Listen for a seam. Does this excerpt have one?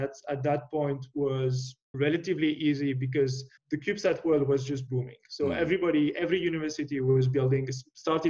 yes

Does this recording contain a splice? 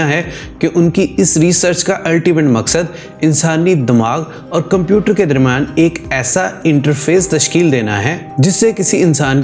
no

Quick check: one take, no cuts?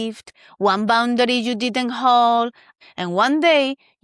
no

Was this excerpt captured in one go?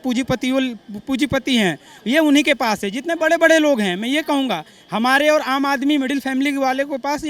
yes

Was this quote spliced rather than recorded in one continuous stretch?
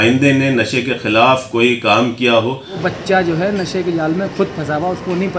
yes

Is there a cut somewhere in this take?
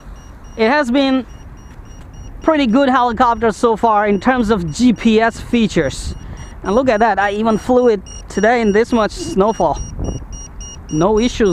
no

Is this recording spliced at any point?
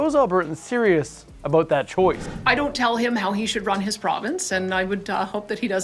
yes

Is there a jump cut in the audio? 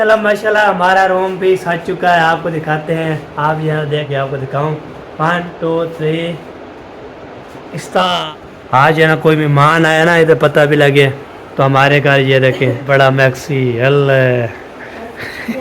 yes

